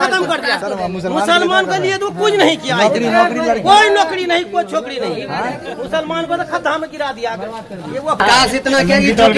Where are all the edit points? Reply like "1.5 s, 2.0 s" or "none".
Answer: 8.2 s